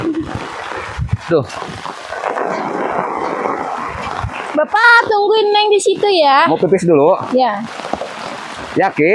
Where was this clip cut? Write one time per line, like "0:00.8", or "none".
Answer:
none